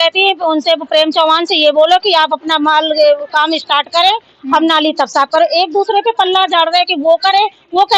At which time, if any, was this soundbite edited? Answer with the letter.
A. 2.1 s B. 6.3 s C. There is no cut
C